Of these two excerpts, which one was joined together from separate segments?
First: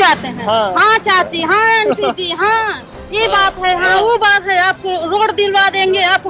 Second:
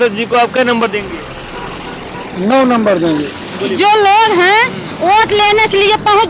second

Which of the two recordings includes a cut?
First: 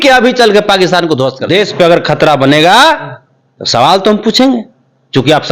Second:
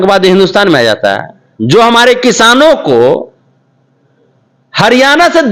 first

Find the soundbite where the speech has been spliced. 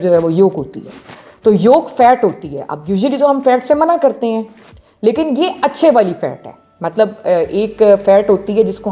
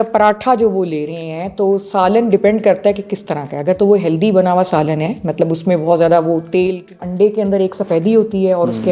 second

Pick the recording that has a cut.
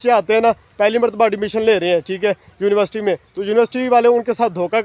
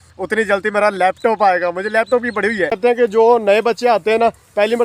second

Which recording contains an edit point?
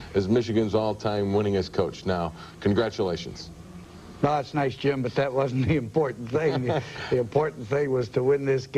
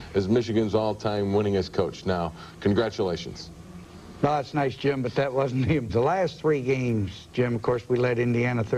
first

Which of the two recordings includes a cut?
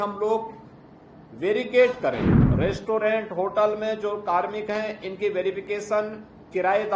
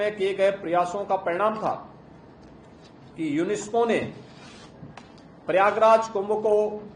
first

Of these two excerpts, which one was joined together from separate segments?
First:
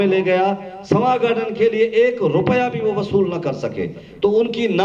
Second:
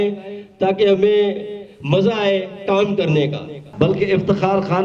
second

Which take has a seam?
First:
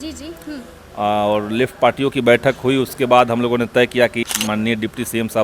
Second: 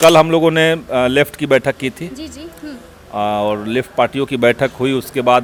first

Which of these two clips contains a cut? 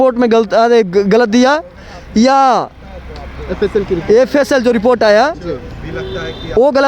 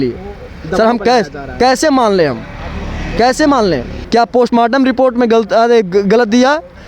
second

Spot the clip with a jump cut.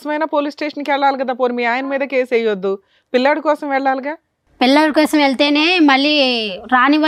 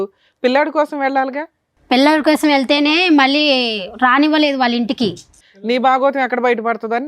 second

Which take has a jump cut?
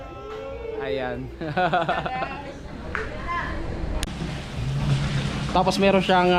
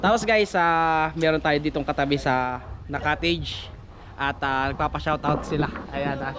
first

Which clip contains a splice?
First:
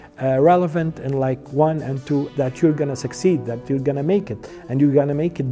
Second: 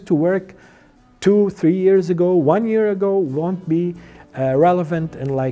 first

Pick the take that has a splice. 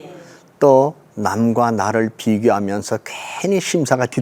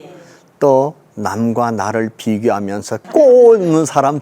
second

